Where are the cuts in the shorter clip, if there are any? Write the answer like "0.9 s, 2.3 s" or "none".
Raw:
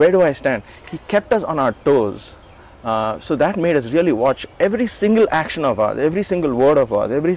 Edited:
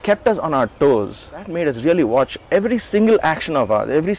1.5 s